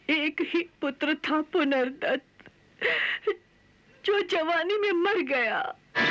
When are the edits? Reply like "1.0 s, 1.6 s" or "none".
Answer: none